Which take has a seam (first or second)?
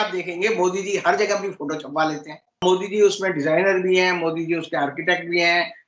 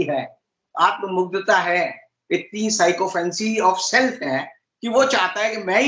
first